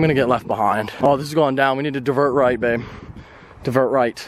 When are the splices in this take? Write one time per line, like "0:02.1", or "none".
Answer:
0:00.9